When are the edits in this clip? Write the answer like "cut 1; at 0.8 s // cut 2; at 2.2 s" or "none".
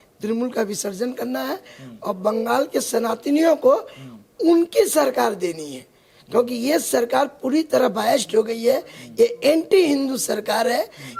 none